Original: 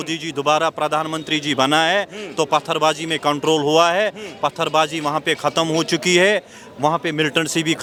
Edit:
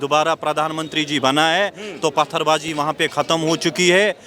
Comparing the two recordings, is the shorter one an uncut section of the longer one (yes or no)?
no